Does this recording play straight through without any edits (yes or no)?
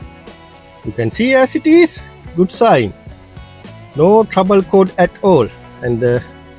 yes